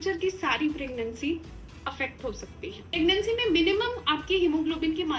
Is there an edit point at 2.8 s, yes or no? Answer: yes